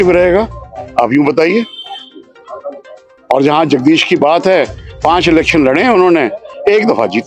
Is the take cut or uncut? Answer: uncut